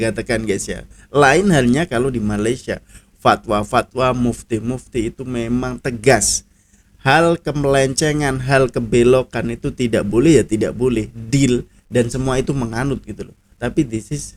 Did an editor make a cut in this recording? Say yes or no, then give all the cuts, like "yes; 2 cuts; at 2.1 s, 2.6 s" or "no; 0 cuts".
no; 0 cuts